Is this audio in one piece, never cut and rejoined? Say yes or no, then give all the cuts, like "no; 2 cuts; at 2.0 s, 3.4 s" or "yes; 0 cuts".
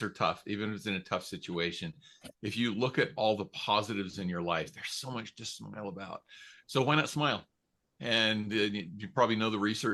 yes; 0 cuts